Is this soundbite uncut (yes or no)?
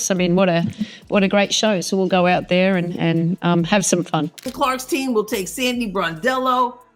no